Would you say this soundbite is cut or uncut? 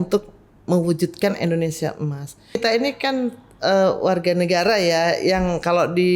cut